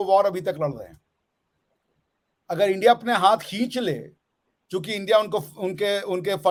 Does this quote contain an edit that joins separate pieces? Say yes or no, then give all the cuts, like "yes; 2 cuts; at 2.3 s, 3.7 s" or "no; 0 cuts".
no; 0 cuts